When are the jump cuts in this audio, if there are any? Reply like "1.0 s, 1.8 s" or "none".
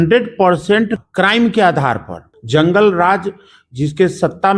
1.0 s, 2.3 s

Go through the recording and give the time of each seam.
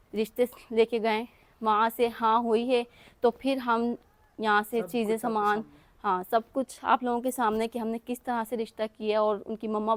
none

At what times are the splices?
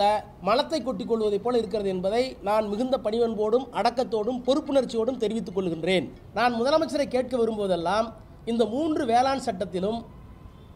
6.2 s

